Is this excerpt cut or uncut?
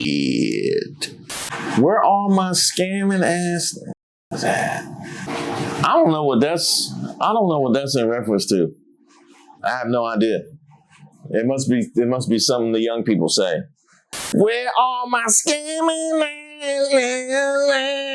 uncut